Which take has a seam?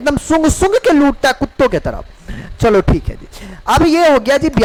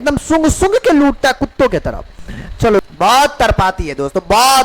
second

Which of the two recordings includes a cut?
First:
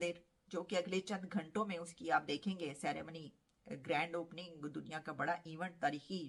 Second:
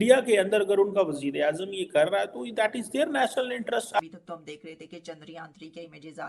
second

